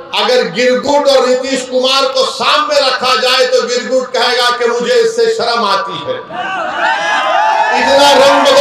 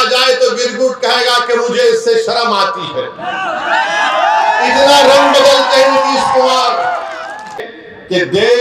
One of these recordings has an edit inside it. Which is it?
second; 1 cut; at 7.7 s

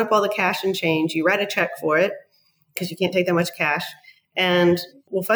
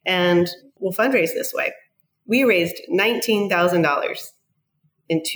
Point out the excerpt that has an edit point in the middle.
first; 1 cut; at 2.8 s

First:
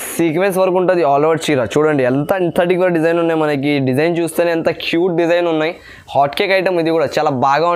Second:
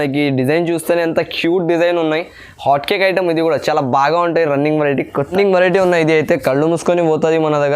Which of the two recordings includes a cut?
second; 1 cut; at 5.3 s

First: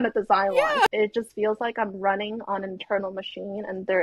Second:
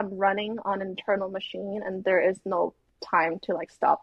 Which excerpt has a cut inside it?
first; 1 cut; at 0.9 s

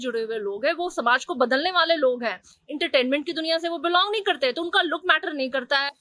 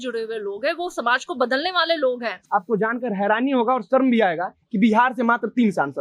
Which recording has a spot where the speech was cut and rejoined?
second; 1 cut; at 2.3 s

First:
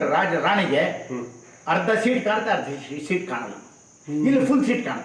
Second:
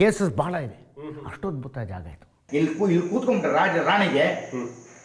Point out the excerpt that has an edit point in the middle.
second; 1 cut; at 2.4 s

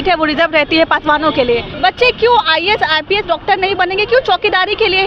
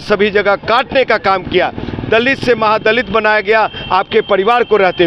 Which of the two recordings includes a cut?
first; 1 cut; at 1.7 s

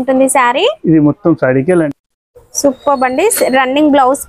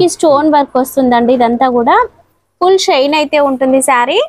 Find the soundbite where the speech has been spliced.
first; 1 cut; at 1.9 s

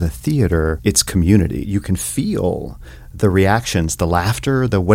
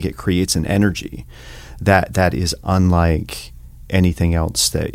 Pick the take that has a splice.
first; 2 cuts; at 0.8 s, 1.6 s

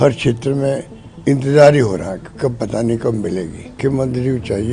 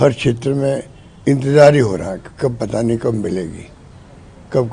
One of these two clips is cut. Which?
first; 1 cut; at 3.7 s

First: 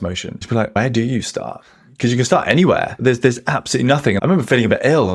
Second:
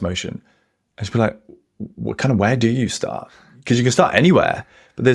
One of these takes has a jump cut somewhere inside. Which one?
first; 3 cuts; at 0.8 s, 2.9 s, 4.2 s

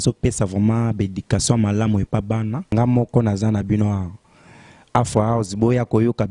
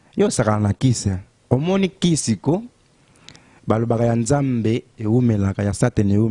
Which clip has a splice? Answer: first; 1 cut; at 2.7 s

